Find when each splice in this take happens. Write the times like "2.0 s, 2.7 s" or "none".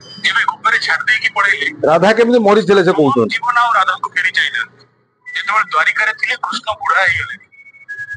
none